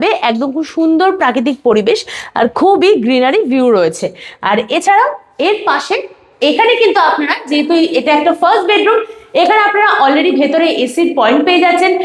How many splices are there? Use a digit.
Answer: 0